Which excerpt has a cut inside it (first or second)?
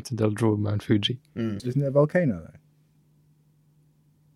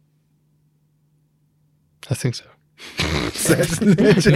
first